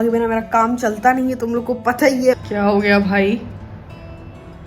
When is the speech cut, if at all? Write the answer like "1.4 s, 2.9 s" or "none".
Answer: 2.4 s